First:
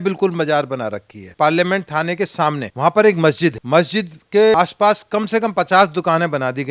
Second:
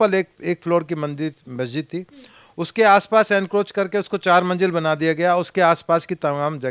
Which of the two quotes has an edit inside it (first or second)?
first